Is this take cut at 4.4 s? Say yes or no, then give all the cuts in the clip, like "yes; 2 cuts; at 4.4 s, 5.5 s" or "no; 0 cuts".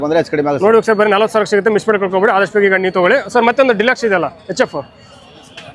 no; 0 cuts